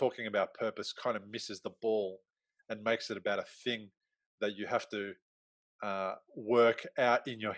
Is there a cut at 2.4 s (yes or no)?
no